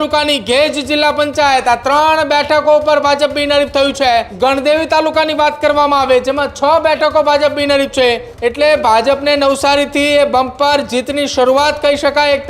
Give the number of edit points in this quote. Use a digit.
2